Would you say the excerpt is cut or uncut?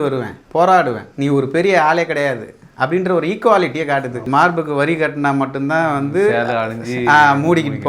cut